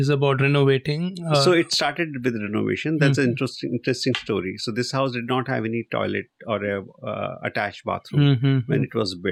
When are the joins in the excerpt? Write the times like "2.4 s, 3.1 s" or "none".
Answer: none